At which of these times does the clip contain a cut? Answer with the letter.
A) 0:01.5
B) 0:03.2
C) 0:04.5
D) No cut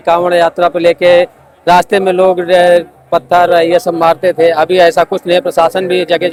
D